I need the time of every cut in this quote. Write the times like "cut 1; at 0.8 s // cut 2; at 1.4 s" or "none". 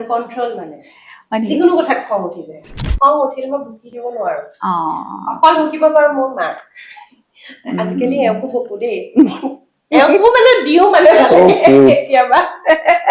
cut 1; at 2.9 s